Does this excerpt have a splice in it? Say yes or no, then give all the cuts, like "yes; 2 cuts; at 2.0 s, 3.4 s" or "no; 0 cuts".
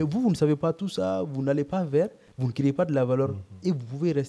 no; 0 cuts